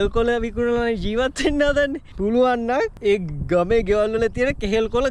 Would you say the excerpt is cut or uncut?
cut